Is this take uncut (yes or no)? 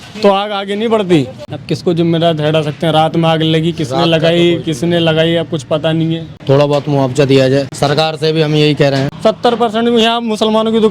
no